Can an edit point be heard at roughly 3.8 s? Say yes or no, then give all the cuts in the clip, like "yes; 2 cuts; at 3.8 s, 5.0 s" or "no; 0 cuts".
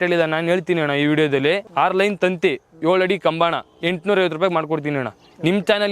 no; 1 cut; at 1.7 s